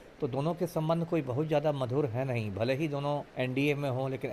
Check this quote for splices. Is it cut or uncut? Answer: cut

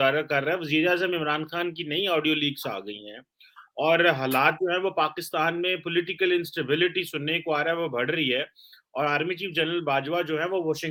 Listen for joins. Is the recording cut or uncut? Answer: uncut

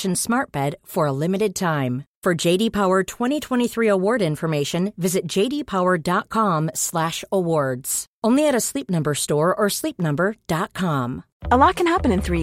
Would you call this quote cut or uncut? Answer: cut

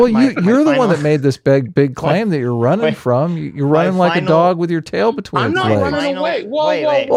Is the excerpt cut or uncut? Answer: uncut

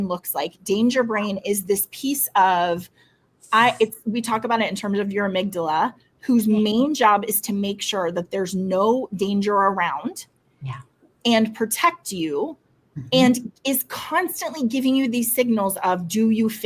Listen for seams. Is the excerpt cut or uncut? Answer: uncut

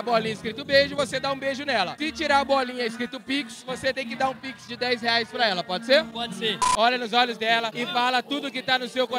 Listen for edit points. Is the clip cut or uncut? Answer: cut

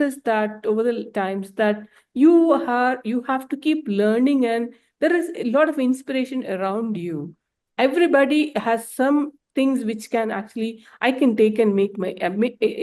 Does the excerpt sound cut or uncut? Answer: uncut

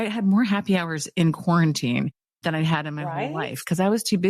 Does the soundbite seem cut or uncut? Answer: uncut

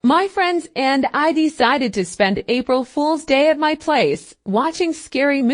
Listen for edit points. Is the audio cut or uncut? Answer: cut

